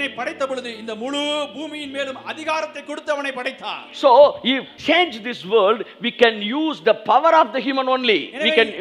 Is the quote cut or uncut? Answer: cut